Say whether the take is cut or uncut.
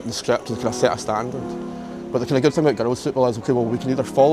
uncut